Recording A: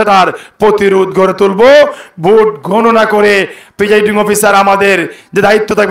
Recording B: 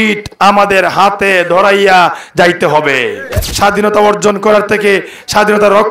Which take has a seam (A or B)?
B